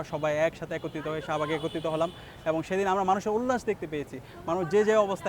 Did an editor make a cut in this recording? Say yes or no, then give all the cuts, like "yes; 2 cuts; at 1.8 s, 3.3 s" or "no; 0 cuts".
no; 0 cuts